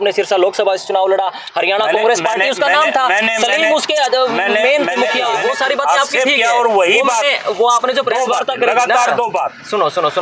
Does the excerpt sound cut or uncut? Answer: cut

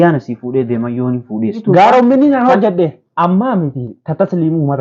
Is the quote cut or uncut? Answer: cut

